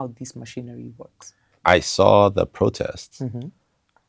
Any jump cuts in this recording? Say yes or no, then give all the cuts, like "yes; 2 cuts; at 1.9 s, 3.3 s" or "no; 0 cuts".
yes; 1 cut; at 1.6 s